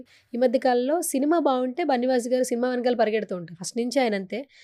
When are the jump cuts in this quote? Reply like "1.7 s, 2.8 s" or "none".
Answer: none